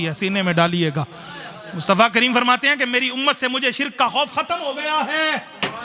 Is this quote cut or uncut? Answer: uncut